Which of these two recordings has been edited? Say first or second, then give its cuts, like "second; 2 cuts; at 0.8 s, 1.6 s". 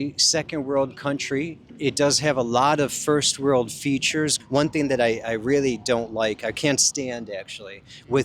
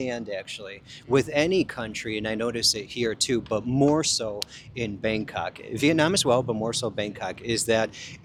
first; 1 cut; at 4.4 s